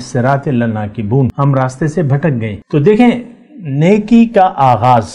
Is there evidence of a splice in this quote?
yes; 2 cuts; at 1.3 s, 2.6 s

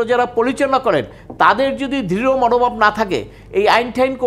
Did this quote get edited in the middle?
no; 0 cuts

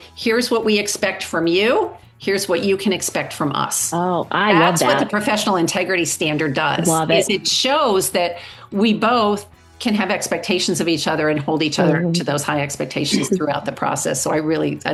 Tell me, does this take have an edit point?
no; 0 cuts

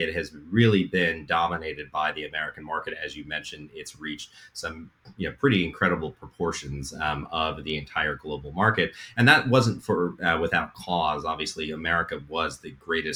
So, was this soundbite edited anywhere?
no; 0 cuts

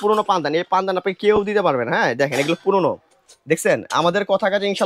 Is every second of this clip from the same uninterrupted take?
yes; 0 cuts

